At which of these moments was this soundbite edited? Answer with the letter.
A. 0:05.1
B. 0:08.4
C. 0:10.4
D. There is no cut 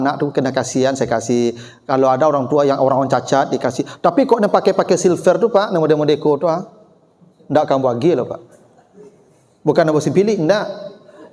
D